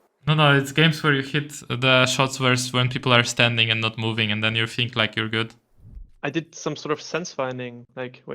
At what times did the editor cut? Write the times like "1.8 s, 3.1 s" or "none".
5.9 s